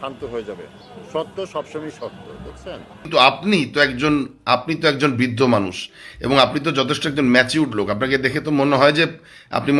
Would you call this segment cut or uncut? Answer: cut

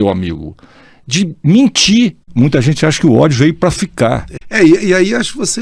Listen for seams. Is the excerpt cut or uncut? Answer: cut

